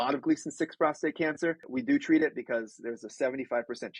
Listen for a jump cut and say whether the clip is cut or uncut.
cut